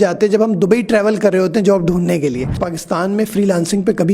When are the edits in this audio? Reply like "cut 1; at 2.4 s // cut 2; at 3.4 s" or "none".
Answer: cut 1; at 2.6 s